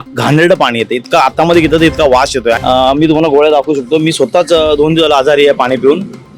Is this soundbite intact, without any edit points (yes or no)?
no